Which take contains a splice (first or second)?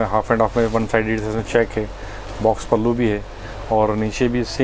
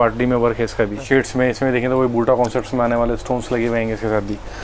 second